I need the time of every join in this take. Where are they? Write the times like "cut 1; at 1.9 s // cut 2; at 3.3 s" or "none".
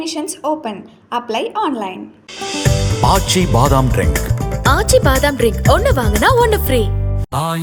none